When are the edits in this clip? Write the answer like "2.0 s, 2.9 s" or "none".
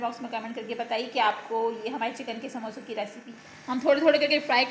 3.2 s